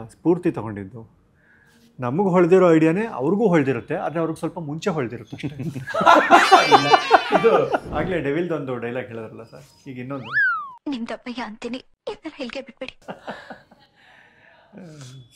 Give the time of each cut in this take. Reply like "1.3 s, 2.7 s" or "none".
7.8 s

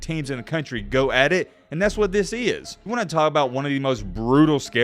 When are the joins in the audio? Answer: 2.8 s

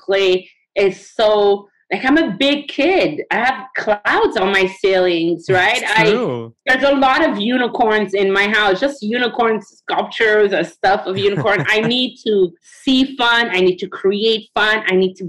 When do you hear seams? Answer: none

